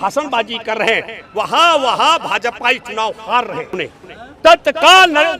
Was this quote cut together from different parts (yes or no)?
yes